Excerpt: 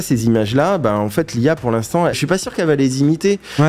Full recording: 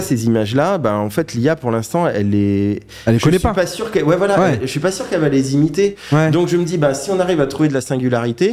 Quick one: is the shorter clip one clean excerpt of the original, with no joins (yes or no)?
no